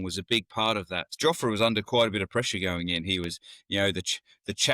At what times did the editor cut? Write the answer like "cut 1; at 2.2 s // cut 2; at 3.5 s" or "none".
cut 1; at 1.1 s

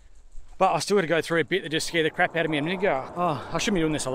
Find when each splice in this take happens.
cut 1; at 3.1 s

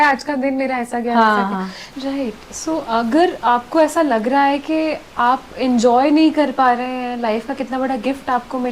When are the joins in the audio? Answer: cut 1; at 1.8 s

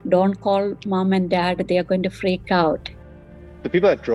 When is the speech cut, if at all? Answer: cut 1; at 3.1 s

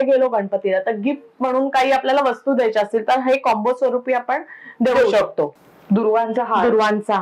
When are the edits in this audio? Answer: cut 1; at 5.6 s

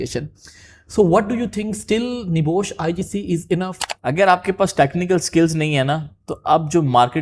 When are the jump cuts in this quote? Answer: cut 1; at 3.9 s

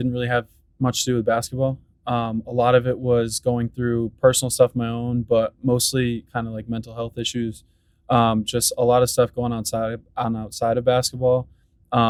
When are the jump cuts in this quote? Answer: none

